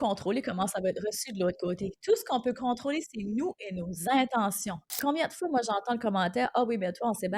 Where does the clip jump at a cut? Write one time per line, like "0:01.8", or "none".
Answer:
0:05.0